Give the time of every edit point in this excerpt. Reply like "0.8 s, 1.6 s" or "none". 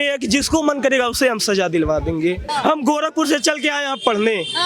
2.4 s